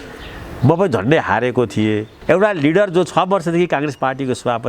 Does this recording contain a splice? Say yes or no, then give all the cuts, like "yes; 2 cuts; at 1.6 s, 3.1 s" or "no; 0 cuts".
yes; 1 cut; at 2.1 s